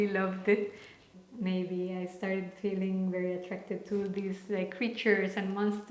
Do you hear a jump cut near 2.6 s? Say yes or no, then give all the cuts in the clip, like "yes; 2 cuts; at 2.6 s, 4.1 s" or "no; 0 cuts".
no; 1 cut; at 1.0 s